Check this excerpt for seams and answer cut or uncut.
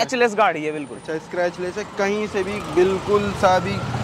uncut